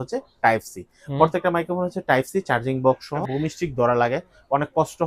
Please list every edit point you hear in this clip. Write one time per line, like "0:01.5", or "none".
0:03.2

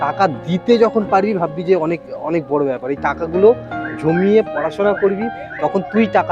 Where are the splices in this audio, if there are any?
0:05.3

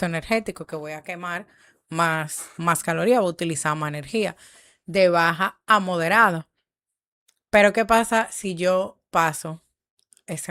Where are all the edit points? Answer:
none

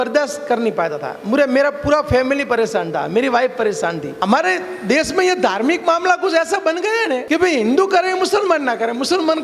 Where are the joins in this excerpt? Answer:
0:04.1
0:07.2

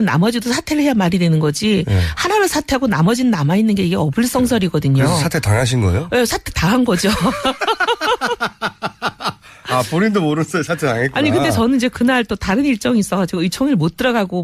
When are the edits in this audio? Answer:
0:06.5

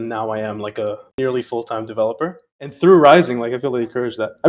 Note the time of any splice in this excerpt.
0:02.7

